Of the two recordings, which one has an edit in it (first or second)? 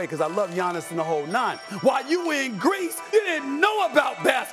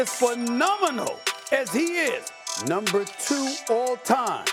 first